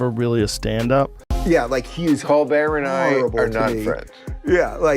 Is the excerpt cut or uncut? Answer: cut